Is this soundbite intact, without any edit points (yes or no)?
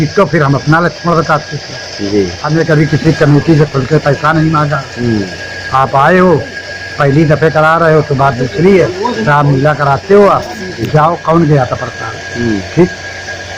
no